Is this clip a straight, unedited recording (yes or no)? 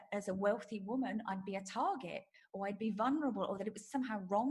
yes